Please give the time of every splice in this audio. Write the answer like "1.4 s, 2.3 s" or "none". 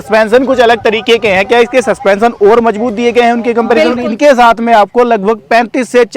4.0 s